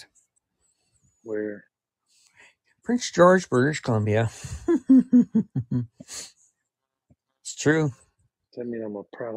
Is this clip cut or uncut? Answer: uncut